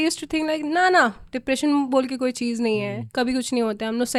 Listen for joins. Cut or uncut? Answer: uncut